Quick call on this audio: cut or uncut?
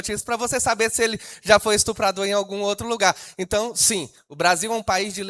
uncut